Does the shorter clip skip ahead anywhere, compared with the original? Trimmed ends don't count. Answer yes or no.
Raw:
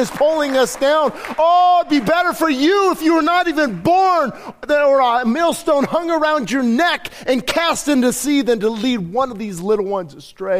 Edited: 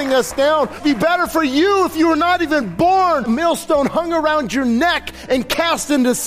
yes